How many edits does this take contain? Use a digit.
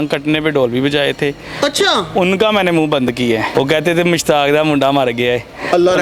1